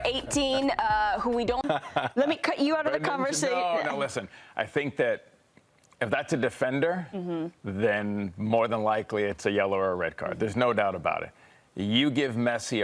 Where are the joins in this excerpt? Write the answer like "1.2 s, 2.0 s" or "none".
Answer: 1.6 s

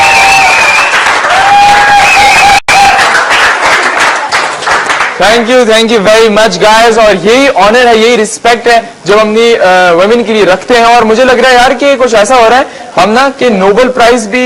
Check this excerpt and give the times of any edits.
6.5 s

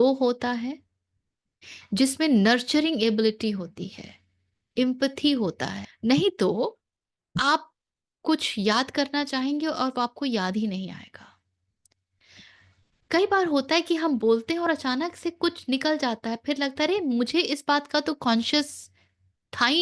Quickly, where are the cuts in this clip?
5.8 s

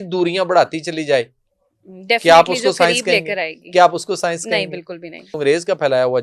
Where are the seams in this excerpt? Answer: 5.3 s

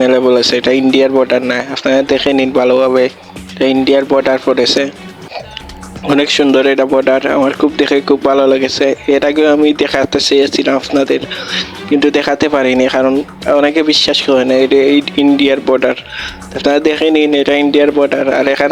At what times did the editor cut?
none

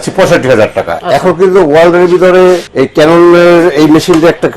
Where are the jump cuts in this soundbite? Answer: 0.9 s, 2.7 s

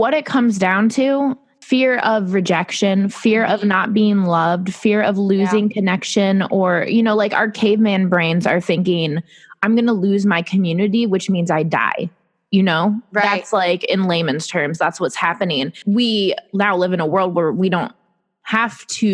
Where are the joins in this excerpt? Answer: 1.5 s, 15.7 s

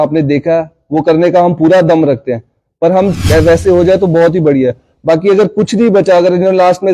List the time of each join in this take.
3.2 s

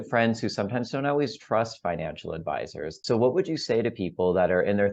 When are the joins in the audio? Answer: 2.9 s

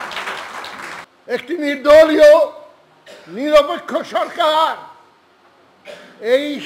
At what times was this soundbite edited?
1.1 s

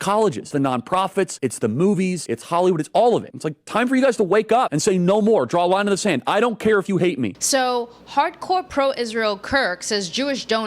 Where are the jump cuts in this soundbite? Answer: 7.4 s

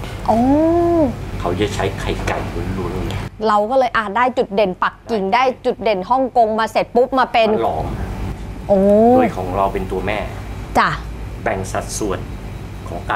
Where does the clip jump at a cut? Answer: none

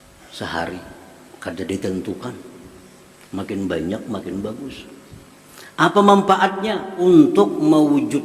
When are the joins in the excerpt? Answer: 7.0 s

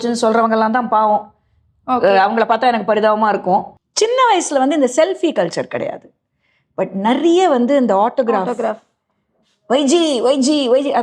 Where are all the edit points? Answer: 3.8 s

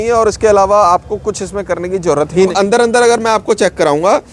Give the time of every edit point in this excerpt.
2.5 s

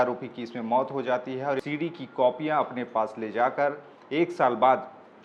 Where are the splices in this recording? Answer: 1.6 s

